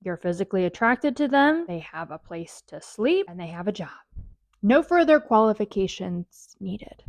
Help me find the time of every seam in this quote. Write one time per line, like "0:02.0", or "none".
0:01.7
0:03.3